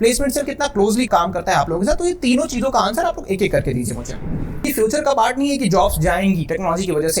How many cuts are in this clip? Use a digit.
1